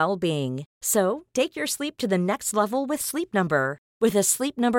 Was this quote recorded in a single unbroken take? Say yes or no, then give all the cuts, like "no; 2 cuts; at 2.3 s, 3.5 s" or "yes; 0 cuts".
yes; 0 cuts